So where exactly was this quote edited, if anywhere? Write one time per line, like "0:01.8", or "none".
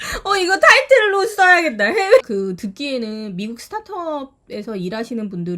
0:02.2